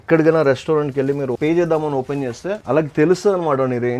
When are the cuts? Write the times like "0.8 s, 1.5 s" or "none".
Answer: 1.4 s, 2.6 s

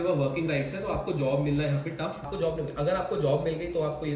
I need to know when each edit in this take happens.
2.2 s

